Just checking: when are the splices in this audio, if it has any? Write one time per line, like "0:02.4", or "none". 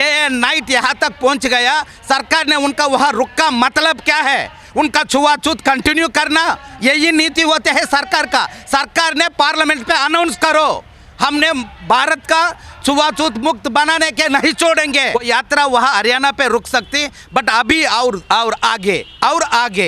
0:15.2